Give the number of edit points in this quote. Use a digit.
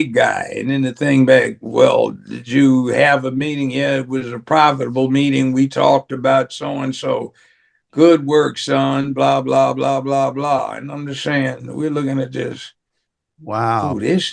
0